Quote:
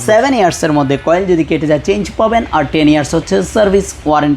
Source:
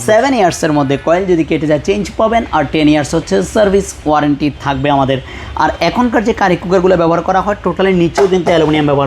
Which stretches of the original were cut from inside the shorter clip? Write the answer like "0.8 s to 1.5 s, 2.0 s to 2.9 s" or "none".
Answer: none